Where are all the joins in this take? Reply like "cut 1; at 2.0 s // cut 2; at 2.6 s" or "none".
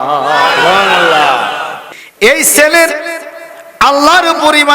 cut 1; at 1.7 s